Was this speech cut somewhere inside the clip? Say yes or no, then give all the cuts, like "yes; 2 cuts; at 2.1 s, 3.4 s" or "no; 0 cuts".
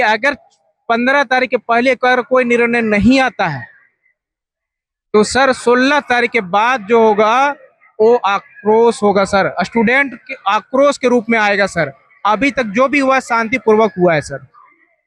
no; 0 cuts